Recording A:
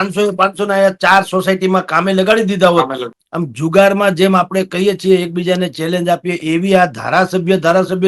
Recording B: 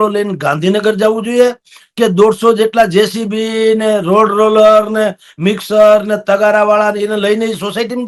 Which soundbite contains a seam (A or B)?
A